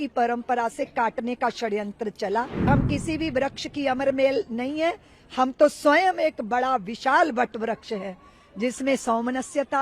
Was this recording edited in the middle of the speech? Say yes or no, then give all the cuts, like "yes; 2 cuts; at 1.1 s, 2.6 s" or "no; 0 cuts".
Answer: yes; 1 cut; at 2.7 s